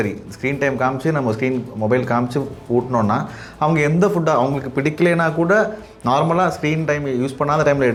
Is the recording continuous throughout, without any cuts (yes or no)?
yes